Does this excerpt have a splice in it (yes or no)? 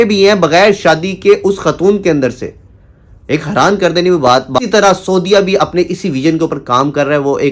yes